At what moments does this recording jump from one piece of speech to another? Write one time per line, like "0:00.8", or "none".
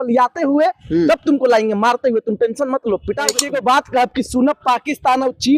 0:03.4